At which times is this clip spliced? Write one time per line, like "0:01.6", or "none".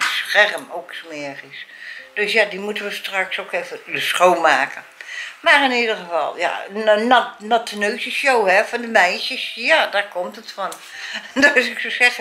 none